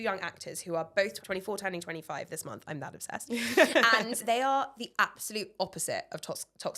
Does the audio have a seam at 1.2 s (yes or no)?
yes